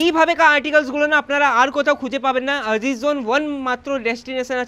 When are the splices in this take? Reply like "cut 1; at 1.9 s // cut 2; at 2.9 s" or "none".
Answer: none